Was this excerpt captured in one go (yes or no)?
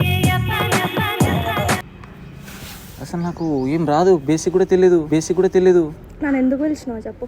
yes